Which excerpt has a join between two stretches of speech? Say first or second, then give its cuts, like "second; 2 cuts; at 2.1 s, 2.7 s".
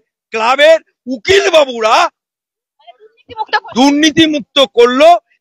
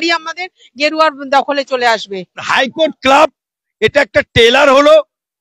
second; 1 cut; at 2.4 s